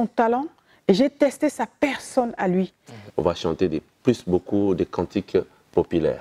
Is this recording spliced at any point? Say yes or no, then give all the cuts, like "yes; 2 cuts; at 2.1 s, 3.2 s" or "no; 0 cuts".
yes; 1 cut; at 3.0 s